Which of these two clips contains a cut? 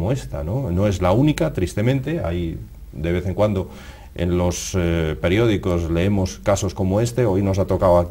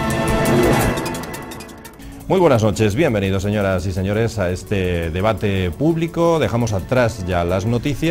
first; 1 cut; at 5.2 s

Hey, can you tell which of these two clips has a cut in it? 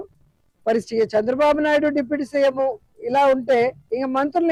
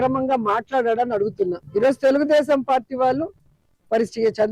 second; 1 cut; at 1.6 s

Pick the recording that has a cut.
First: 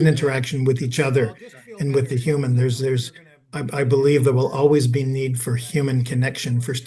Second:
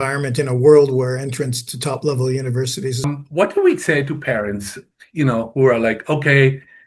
second; 1 cut; at 3.1 s

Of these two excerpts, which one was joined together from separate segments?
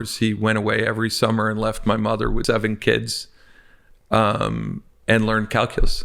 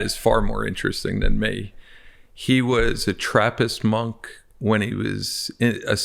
first; 1 cut; at 2.4 s

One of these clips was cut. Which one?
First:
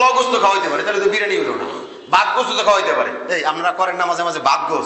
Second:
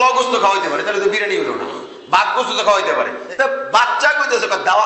second; 1 cut; at 3.2 s

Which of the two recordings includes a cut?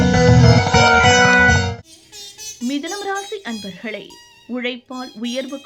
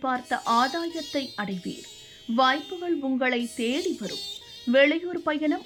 first; 1 cut; at 2.0 s

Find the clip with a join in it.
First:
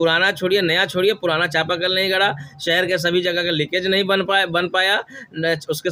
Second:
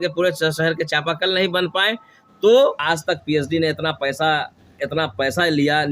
second; 1 cut; at 2.8 s

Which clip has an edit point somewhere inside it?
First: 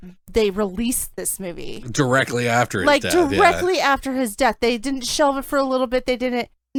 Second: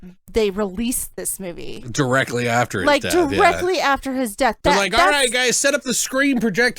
second; 1 cut; at 4.6 s

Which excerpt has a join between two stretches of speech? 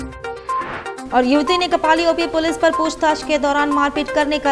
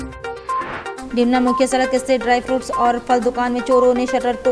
second; 1 cut; at 1.0 s

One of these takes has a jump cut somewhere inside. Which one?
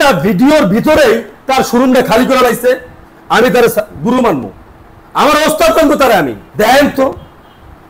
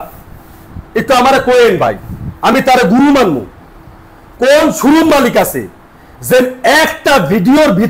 first; 1 cut; at 6.4 s

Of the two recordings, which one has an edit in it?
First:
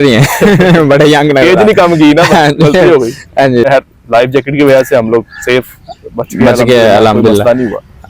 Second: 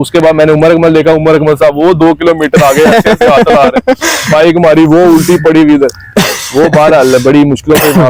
first; 1 cut; at 3.7 s

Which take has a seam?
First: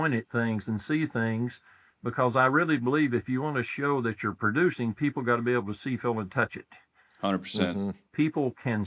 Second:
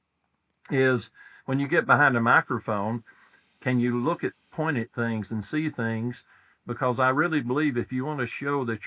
first; 1 cut; at 7.8 s

